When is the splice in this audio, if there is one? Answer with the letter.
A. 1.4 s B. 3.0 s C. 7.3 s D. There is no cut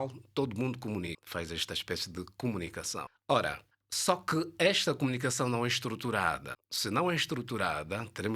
D